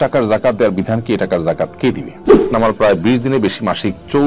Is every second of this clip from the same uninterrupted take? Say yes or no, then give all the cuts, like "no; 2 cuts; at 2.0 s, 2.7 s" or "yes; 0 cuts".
no; 1 cut; at 2.2 s